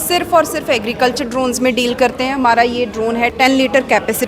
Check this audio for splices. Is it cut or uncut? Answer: cut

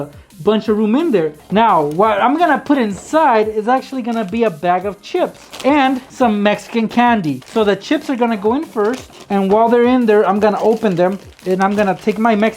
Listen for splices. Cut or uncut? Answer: cut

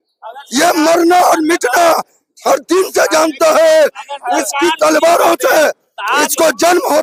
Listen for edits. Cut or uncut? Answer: uncut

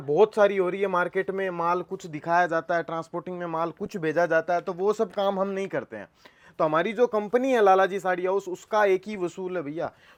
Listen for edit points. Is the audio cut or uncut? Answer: uncut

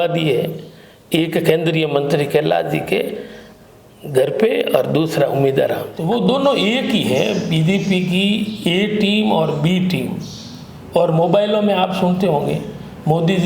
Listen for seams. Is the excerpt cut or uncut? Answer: cut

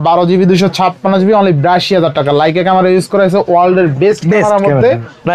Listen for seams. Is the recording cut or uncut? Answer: uncut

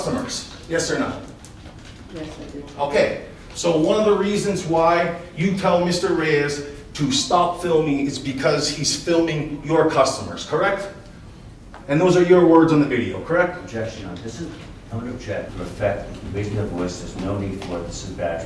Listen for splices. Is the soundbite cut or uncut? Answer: cut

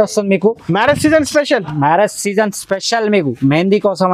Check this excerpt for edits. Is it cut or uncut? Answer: uncut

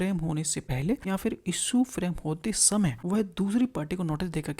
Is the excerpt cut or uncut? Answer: cut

